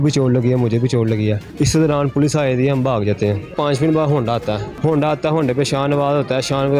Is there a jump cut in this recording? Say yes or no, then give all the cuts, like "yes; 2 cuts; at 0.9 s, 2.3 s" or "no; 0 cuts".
yes; 3 cuts; at 1.4 s, 3.5 s, 4.7 s